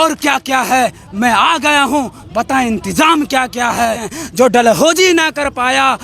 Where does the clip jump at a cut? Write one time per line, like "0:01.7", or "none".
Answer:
0:04.2